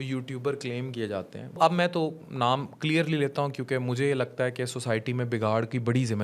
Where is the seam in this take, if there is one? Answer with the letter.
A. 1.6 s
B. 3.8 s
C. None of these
A